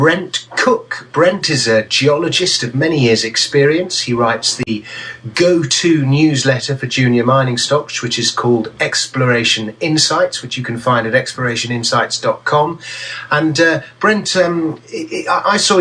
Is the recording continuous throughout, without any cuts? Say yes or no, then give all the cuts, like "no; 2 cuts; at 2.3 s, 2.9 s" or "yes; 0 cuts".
no; 1 cut; at 8.5 s